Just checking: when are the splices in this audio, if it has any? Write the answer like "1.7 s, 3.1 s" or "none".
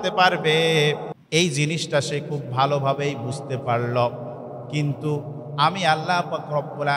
1.1 s